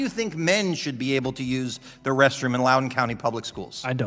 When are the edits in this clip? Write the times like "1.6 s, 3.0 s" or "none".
none